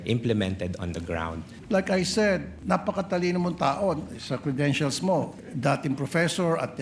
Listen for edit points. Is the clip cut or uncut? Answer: cut